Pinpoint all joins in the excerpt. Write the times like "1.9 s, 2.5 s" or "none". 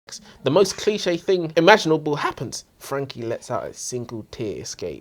1.5 s